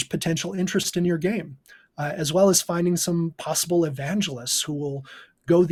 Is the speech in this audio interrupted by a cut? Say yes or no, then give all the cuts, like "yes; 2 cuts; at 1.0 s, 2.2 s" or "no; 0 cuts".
no; 0 cuts